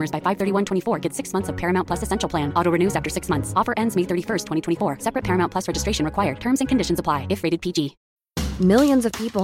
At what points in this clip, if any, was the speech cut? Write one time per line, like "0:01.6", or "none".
0:08.0